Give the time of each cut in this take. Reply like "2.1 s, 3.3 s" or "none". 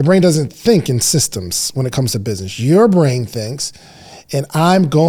none